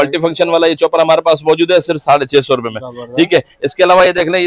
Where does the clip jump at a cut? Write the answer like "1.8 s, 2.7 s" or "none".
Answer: none